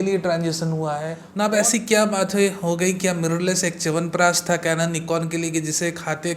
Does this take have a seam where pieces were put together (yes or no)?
yes